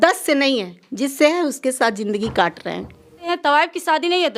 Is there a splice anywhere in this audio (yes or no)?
yes